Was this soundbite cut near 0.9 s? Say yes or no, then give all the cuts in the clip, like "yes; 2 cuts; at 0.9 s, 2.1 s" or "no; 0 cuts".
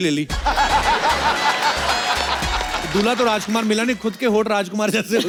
no; 0 cuts